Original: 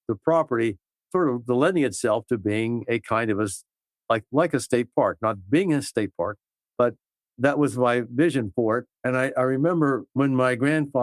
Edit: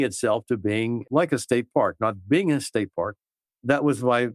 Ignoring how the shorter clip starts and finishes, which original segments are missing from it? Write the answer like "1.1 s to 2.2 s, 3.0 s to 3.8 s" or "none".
2.8 s to 4.2 s, 6.6 s to 7.1 s